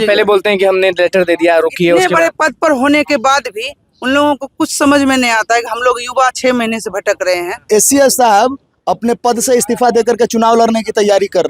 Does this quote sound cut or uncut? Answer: cut